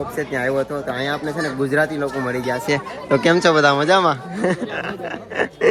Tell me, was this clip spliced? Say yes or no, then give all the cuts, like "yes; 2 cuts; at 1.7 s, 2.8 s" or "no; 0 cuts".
no; 0 cuts